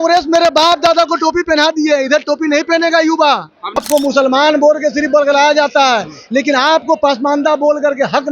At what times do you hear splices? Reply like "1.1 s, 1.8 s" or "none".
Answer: 3.8 s